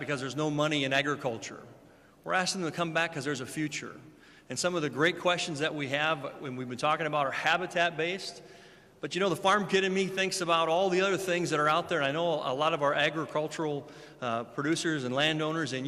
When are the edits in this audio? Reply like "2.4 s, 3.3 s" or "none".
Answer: none